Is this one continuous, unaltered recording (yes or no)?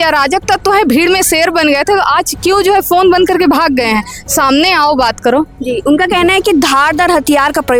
yes